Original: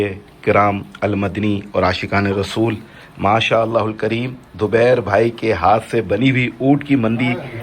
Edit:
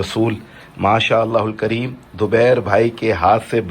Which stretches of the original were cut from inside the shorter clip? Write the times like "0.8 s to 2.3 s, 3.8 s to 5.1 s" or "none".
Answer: none